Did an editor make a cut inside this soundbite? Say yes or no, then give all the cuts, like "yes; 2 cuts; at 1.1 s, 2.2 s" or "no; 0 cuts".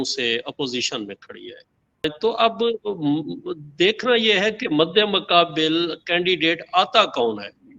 yes; 1 cut; at 2.0 s